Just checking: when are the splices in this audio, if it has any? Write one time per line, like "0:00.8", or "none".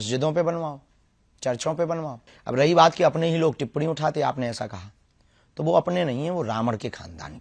0:02.3